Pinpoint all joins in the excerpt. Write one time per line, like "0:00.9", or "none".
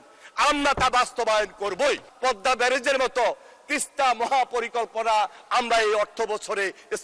0:02.1